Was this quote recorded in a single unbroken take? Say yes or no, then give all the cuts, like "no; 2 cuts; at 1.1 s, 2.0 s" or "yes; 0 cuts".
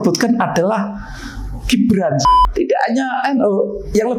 no; 1 cut; at 2.3 s